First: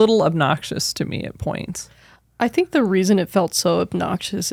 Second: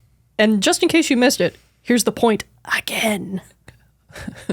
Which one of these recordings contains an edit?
second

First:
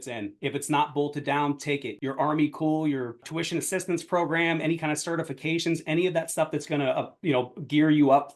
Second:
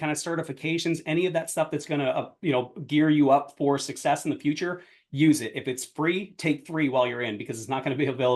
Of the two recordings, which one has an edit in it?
first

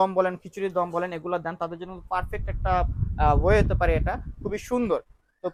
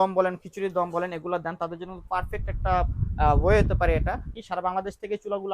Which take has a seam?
second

